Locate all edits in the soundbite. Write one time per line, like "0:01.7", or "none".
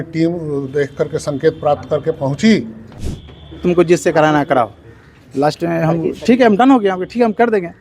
0:03.1